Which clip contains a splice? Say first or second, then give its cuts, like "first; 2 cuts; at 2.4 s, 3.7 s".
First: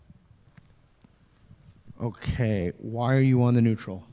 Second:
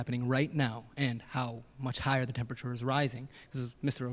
first; 1 cut; at 1.9 s